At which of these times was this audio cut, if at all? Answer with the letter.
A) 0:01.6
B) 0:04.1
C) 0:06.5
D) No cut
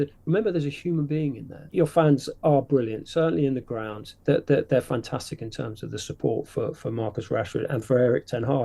A